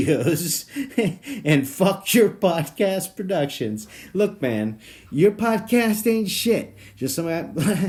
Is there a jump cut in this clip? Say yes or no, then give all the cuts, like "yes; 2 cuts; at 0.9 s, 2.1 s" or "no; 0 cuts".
no; 0 cuts